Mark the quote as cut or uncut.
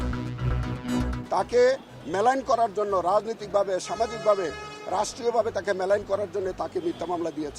cut